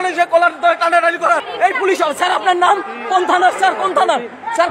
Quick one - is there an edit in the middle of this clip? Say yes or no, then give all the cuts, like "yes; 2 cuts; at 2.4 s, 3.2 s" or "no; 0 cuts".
yes; 1 cut; at 1.5 s